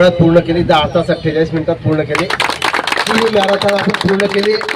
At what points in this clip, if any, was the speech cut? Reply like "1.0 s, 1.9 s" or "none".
3.1 s